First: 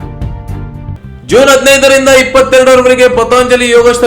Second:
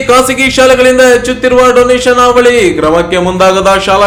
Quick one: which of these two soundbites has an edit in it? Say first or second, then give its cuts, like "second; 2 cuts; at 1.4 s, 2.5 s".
first; 1 cut; at 0.9 s